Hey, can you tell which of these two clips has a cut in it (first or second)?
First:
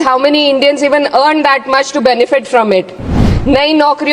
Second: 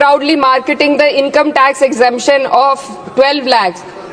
first